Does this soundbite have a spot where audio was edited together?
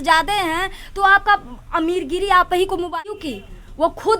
yes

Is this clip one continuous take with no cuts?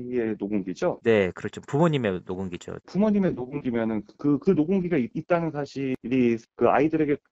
yes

